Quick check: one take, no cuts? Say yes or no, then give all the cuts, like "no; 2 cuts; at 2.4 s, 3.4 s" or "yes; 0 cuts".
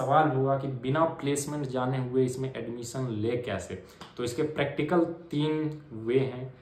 yes; 0 cuts